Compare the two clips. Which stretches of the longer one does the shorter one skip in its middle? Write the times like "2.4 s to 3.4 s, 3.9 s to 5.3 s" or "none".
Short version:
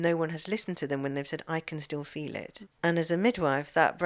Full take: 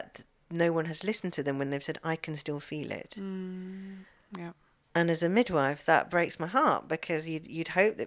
3.1 s to 4.7 s